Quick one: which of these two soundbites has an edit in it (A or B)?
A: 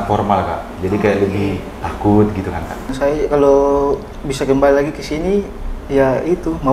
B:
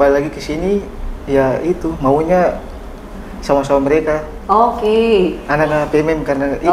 A